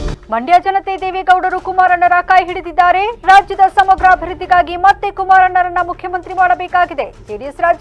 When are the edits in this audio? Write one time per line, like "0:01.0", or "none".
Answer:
none